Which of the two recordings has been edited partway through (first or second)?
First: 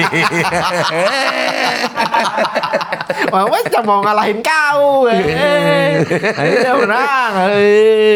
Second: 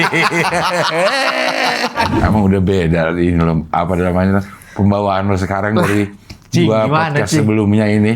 second